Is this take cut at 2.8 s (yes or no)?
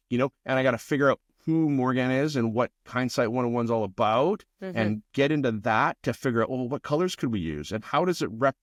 no